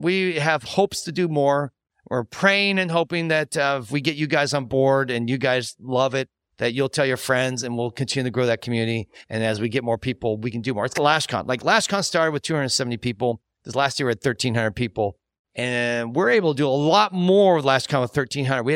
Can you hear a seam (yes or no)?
no